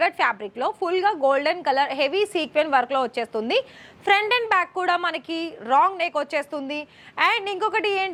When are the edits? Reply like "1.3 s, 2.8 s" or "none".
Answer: none